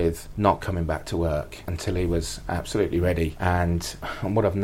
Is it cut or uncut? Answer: uncut